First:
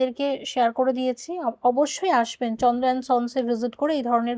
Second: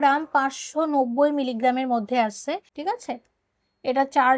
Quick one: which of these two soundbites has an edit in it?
second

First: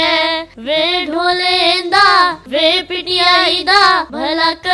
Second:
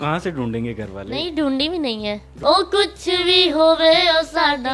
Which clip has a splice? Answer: second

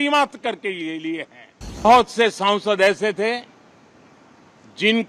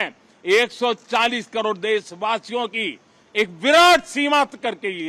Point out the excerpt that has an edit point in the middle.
first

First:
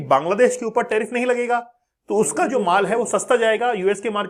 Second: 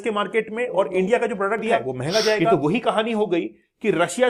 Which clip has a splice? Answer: second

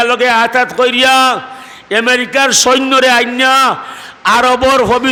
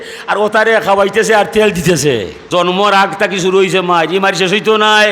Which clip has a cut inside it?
second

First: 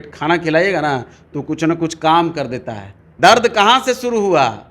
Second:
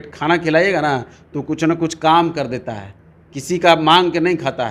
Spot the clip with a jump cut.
first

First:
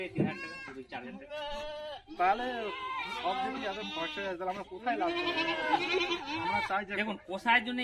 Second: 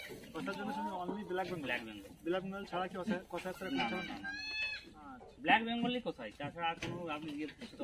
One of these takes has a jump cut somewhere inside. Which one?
first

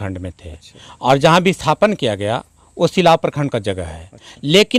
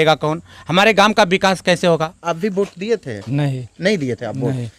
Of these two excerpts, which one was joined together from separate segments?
second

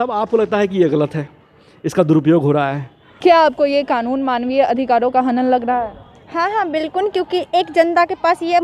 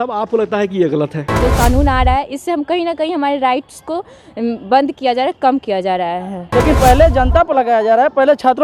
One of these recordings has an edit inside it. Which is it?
second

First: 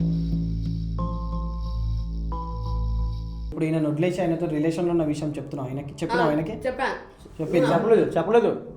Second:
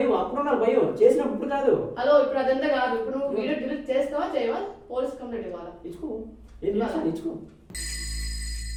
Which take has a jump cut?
first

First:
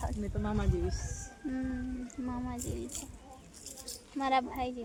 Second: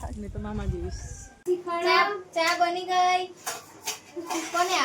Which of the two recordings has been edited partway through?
second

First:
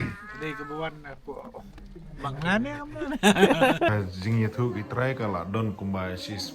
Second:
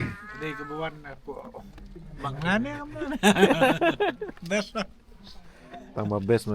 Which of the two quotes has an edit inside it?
first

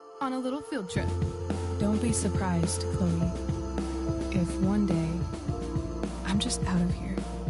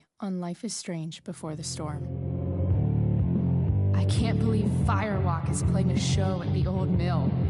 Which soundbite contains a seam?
second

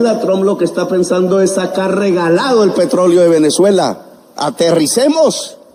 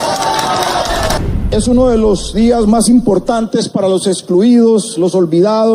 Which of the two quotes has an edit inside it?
second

